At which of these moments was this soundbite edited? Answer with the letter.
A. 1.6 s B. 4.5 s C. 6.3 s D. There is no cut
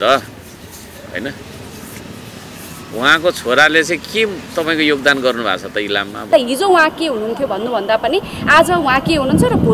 C